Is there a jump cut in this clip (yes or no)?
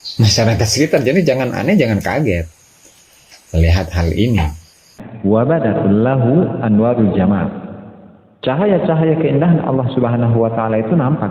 yes